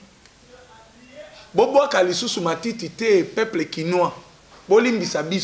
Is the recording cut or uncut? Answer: uncut